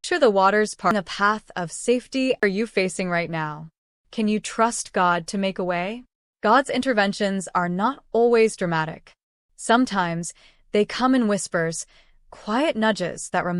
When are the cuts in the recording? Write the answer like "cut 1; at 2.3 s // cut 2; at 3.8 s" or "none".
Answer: cut 1; at 0.9 s // cut 2; at 2.4 s